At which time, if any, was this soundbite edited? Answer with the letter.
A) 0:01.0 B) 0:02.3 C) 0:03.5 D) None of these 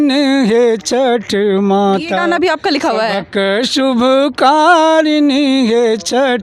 D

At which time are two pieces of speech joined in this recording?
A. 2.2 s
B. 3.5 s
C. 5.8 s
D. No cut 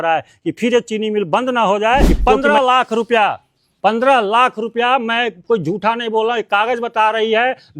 A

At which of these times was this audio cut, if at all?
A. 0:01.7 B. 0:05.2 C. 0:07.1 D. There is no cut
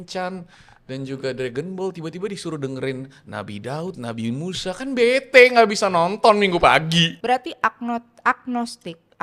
C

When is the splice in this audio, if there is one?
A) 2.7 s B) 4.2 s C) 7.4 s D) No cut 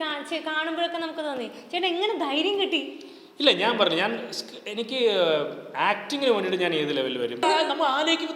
C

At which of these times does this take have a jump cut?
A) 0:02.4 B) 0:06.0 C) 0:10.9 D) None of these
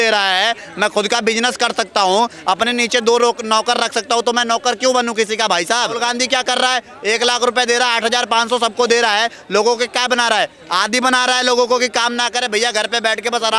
B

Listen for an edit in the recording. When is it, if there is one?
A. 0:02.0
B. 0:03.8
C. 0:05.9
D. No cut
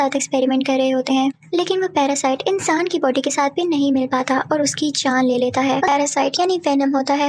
C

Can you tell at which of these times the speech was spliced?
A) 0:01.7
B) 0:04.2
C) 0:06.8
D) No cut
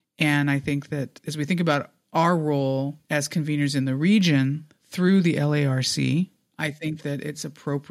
C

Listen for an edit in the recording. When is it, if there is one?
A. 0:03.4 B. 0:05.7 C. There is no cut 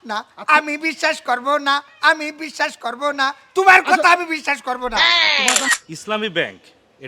B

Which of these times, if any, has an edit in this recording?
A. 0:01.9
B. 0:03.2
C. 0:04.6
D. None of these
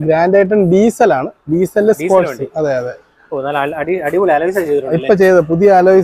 D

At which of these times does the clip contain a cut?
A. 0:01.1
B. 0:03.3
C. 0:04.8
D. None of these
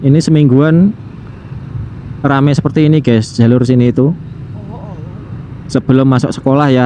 D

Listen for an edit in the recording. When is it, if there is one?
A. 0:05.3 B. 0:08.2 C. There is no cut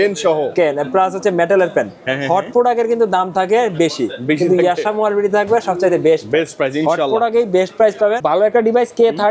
B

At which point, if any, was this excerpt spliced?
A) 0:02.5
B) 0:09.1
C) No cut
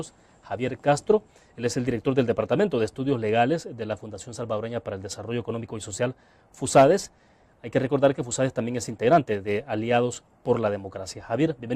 A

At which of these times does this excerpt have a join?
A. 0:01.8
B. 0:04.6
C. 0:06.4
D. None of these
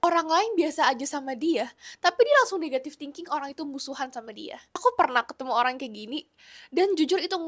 B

